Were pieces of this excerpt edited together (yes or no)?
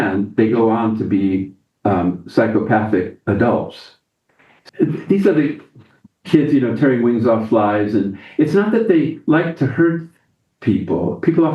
yes